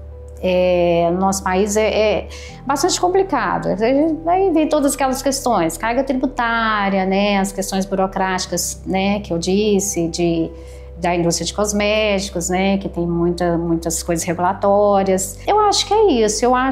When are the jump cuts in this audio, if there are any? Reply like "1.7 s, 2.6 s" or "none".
none